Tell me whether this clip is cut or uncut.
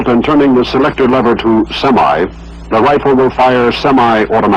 cut